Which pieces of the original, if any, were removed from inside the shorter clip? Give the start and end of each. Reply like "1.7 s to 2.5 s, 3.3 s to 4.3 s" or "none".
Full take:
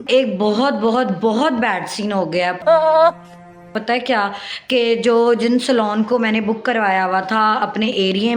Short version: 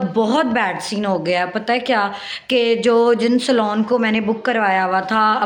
2.5 s to 3.7 s